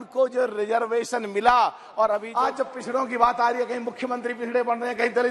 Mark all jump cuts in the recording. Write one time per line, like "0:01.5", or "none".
0:02.3